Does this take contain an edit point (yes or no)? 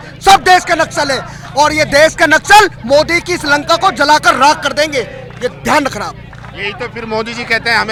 no